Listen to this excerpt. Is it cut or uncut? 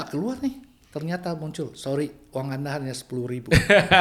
uncut